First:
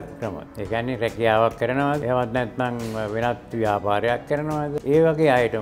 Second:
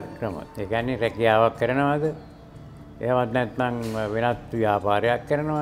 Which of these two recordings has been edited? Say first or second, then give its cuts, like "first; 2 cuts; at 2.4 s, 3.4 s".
first; 2 cuts; at 2.0 s, 4.8 s